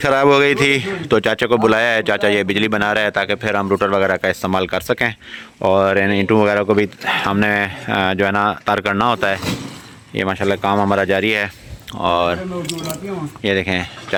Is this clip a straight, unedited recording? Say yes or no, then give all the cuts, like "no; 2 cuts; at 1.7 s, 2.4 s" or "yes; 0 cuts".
yes; 0 cuts